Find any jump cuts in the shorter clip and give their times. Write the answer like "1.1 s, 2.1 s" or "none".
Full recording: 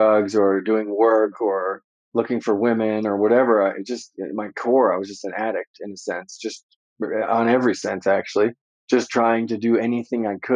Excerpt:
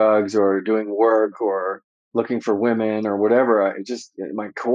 none